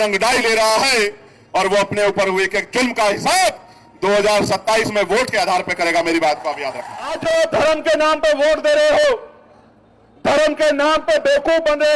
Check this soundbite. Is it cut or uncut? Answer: cut